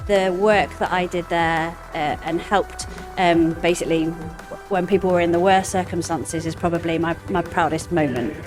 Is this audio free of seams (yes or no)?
yes